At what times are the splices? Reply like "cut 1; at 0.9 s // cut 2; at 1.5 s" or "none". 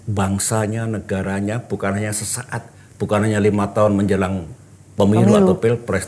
none